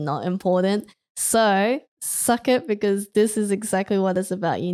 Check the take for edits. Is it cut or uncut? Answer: uncut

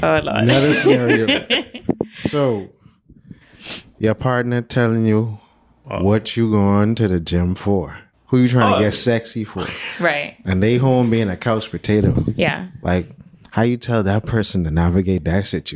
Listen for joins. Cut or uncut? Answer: uncut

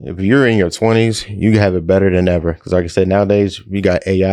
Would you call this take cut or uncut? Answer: uncut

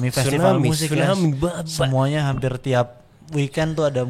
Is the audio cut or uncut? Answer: uncut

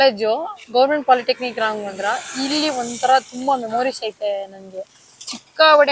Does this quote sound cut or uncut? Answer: uncut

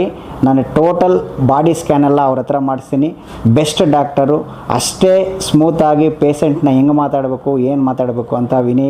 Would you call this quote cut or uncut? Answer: cut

